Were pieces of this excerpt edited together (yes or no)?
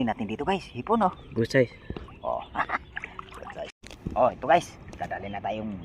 yes